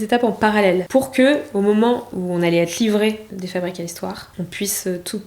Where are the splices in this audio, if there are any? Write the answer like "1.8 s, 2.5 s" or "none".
0.8 s, 2.1 s, 3.3 s, 4.2 s